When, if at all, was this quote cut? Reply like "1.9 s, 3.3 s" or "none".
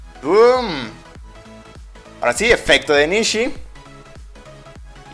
none

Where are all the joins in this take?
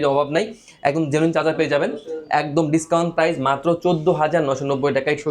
none

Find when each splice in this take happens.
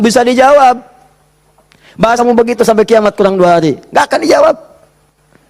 2.2 s

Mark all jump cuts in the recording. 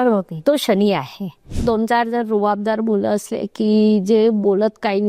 1.4 s

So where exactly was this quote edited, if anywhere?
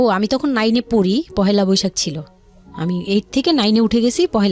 none

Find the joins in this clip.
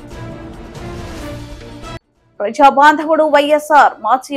2.1 s

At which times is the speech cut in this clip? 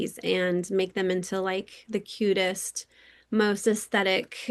none

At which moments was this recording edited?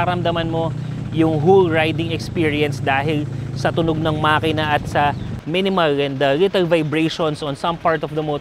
none

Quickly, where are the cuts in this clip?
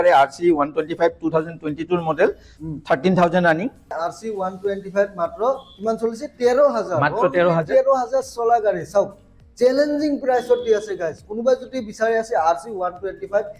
3.9 s

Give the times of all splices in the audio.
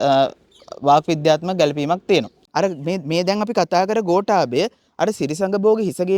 2.4 s

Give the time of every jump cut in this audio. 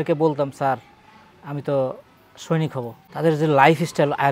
3.0 s

